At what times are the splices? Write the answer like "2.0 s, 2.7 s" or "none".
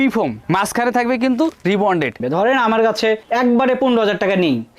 2.2 s